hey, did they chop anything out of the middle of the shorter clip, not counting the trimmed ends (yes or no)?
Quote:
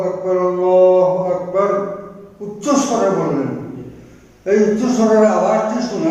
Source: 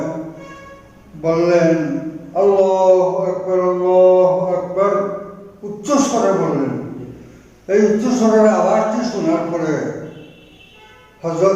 no